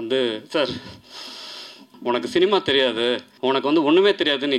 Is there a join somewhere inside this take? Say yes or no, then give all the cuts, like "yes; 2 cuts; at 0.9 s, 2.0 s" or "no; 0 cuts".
yes; 2 cuts; at 1.9 s, 3.3 s